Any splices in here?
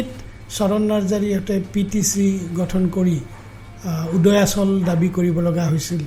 no; 0 cuts

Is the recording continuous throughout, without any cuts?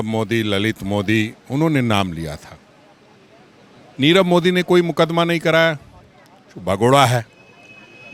yes; 0 cuts

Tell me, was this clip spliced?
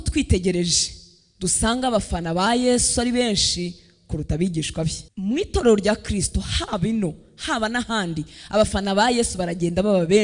yes; 1 cut; at 5.1 s

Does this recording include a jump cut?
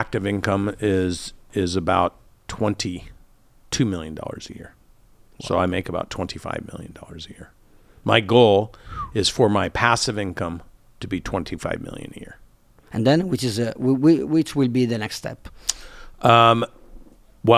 no; 0 cuts

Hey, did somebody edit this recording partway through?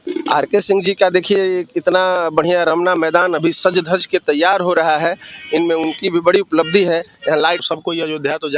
yes; 1 cut; at 7.6 s

